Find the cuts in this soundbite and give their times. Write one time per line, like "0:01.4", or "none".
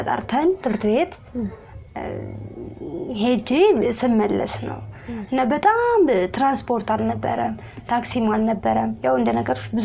none